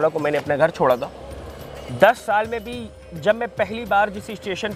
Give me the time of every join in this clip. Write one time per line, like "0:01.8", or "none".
none